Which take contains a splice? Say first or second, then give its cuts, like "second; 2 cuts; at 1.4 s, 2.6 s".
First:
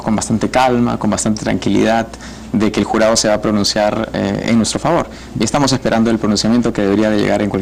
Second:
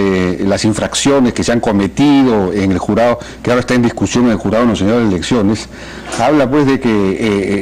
second; 1 cut; at 5.6 s